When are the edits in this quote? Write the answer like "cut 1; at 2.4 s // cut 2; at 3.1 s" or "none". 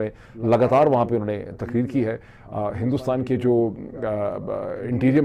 none